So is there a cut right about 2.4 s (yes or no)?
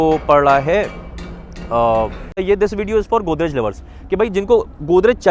yes